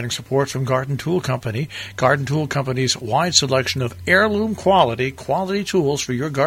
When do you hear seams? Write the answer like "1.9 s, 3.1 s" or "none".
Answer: none

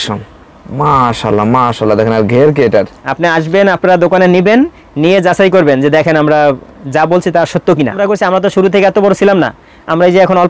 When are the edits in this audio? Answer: 3.0 s, 8.0 s

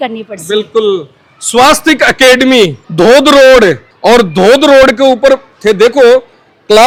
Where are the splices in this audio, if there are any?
none

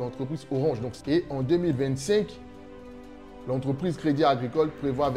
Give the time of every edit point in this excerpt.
0.9 s

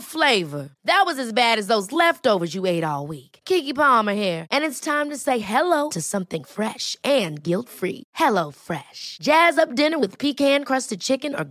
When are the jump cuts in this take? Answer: none

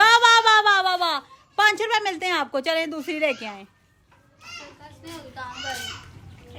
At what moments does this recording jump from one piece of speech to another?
none

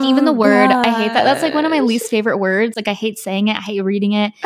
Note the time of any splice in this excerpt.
none

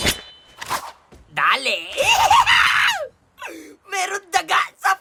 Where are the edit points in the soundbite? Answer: none

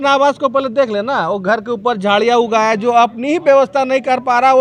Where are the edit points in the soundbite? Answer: none

